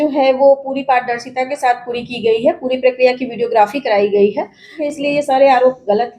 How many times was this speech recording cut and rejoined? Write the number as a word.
one